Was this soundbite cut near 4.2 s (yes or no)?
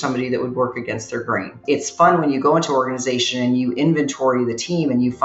no